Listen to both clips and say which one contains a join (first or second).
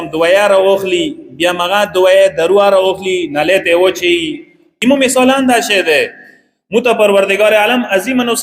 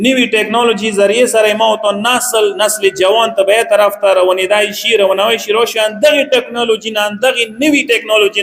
first